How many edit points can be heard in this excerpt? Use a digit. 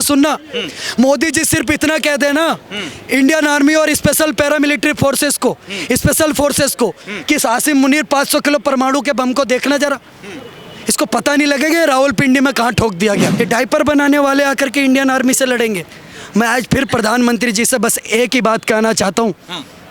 1